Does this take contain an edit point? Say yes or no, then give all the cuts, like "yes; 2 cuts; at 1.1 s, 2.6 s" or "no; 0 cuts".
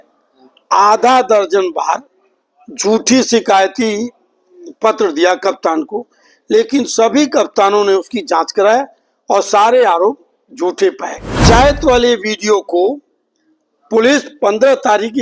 yes; 1 cut; at 11.4 s